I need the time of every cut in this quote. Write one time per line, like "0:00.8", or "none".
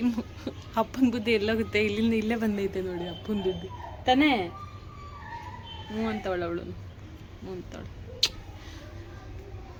none